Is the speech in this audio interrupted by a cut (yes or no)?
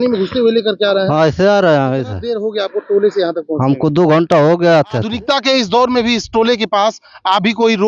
yes